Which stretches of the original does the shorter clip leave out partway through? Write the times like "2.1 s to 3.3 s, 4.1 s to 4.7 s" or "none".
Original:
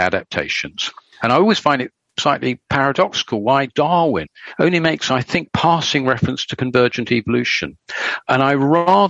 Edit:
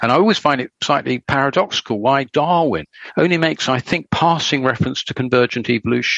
2.2 s to 2.4 s